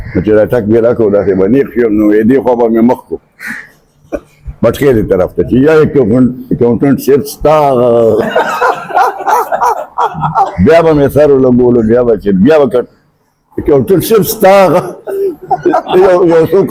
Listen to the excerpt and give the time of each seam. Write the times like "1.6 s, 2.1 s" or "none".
none